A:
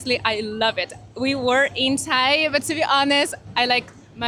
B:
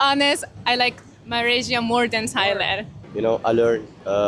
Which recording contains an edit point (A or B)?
B